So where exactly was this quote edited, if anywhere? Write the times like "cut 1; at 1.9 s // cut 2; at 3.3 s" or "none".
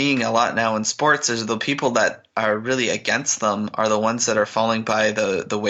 none

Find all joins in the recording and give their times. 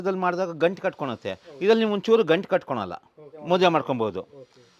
none

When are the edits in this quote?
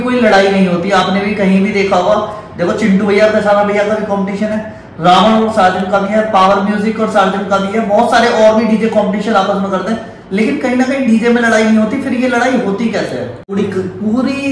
cut 1; at 13.5 s

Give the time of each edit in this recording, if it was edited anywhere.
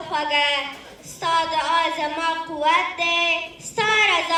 none

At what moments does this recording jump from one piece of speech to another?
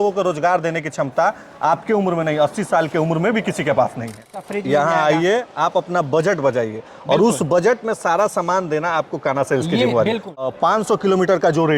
cut 1; at 4.4 s // cut 2; at 10.4 s

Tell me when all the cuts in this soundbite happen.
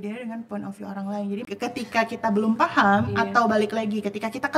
cut 1; at 1.5 s

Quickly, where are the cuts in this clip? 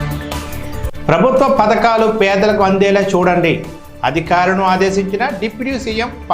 cut 1; at 0.9 s

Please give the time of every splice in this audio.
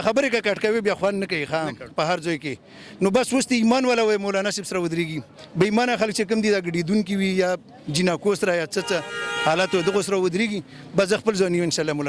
cut 1; at 1.9 s

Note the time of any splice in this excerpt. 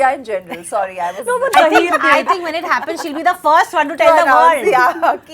cut 1; at 1.5 s

